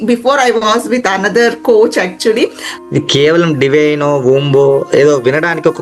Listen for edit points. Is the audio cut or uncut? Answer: cut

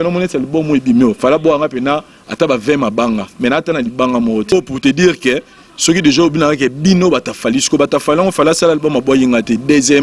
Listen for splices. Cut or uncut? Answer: cut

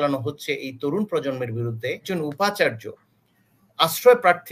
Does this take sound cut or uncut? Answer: cut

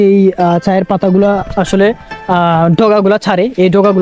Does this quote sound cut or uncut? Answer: uncut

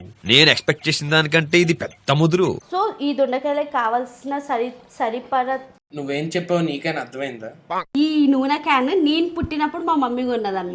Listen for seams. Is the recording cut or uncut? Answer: cut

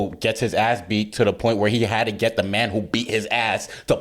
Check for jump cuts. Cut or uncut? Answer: uncut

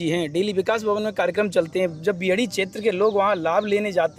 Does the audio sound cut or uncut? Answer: uncut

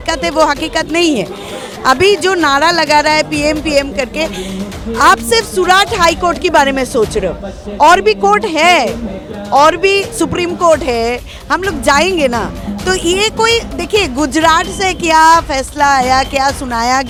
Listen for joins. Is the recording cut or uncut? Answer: uncut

